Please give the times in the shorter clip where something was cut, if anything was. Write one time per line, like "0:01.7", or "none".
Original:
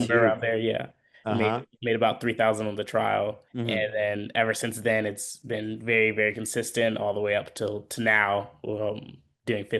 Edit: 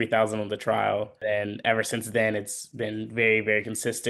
0:01.2